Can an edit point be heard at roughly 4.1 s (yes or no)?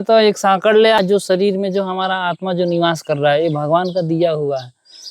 no